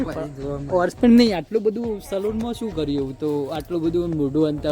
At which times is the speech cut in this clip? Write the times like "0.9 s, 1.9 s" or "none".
0.9 s